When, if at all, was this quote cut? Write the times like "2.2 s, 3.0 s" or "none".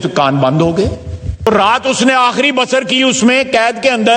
1.5 s